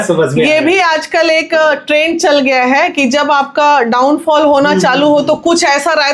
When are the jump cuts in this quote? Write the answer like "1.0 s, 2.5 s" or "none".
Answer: none